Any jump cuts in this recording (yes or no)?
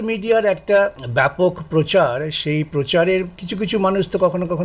yes